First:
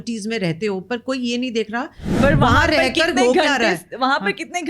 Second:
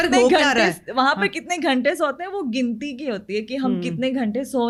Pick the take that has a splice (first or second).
first